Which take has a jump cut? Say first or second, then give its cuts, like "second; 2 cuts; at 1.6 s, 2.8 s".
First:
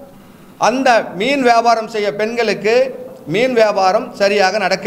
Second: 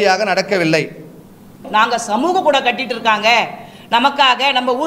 second; 1 cut; at 1.6 s